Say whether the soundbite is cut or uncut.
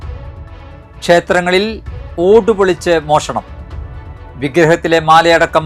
cut